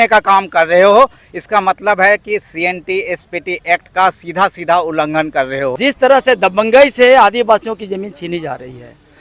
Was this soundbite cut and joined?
yes; 1 cut; at 5.7 s

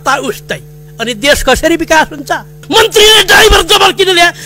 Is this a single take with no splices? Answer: no; 1 cut; at 2.5 s

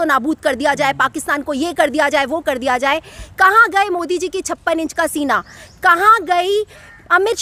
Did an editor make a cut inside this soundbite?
no; 0 cuts

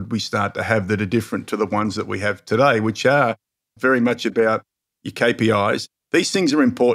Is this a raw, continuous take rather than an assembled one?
no; 1 cut; at 3.7 s

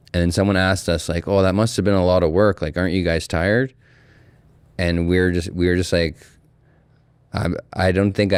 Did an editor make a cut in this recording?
no; 0 cuts

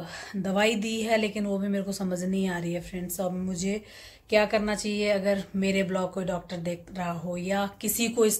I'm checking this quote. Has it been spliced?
no; 0 cuts

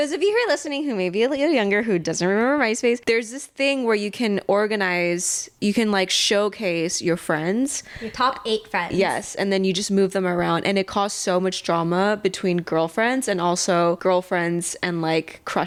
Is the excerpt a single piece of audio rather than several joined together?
yes; 0 cuts

